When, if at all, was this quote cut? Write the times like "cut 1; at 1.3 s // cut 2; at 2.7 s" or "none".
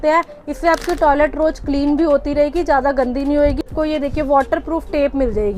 cut 1; at 3.7 s